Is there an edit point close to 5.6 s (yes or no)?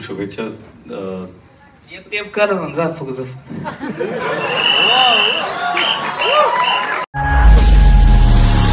no